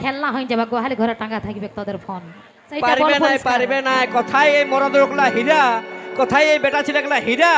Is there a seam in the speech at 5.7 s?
no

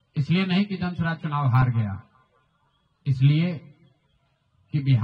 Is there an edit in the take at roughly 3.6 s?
no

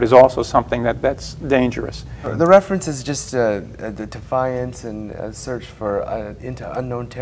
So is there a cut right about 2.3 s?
yes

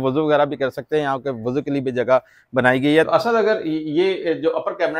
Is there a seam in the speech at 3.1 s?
yes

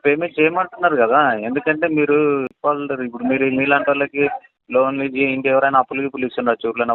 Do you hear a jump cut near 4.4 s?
no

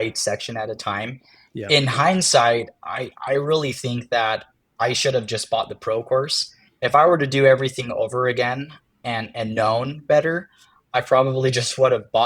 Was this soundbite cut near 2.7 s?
no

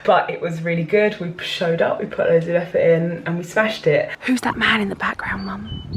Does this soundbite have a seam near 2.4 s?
no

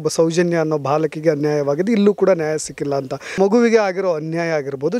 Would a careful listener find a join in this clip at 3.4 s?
yes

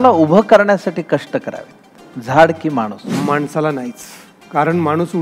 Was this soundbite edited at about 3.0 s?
yes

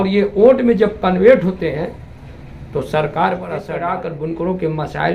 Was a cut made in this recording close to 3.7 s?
yes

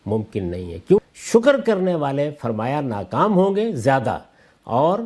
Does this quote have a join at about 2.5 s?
no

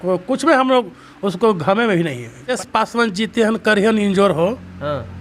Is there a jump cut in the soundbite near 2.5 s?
yes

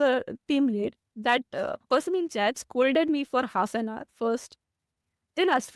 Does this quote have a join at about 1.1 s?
yes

